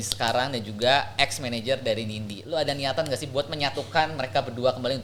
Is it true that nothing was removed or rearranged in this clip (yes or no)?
yes